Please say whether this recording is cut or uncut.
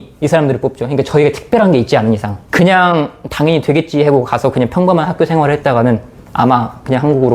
cut